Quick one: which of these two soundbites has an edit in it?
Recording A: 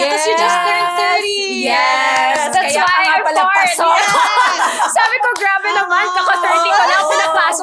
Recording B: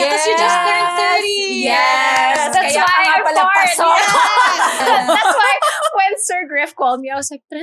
B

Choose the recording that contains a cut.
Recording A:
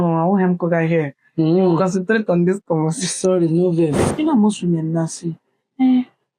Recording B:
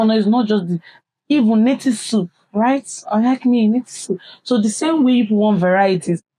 A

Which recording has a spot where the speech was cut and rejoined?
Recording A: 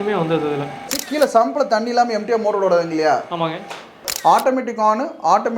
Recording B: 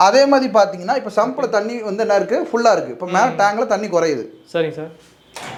A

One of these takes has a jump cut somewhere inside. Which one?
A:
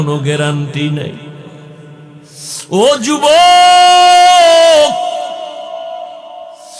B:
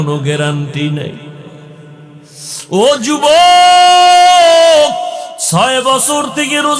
B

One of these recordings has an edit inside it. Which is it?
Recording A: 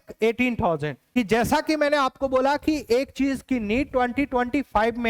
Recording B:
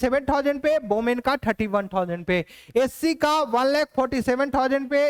A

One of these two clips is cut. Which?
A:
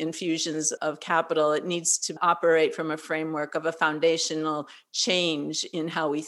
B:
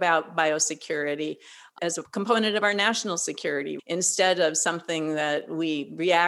B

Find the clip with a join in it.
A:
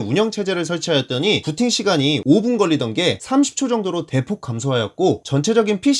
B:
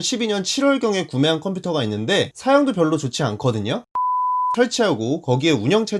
A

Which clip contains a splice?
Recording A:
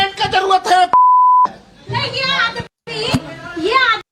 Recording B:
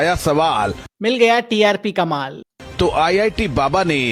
A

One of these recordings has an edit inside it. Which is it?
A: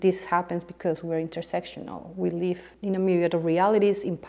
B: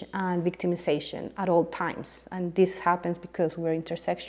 A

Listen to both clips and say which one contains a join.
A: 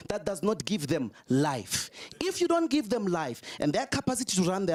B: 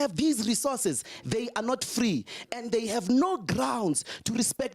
B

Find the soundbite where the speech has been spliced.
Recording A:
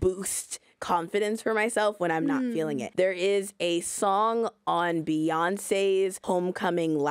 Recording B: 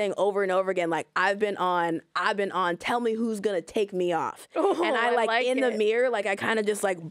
A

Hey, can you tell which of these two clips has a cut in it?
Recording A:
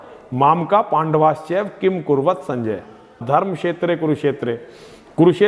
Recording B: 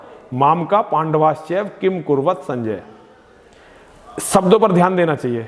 A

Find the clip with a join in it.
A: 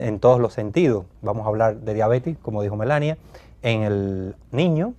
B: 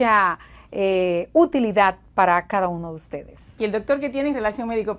A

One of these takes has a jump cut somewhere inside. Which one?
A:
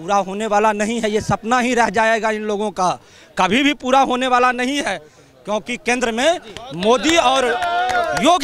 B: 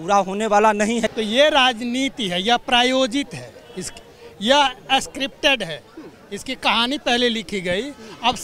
B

